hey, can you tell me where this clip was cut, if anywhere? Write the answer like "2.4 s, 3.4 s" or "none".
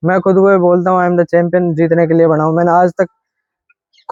none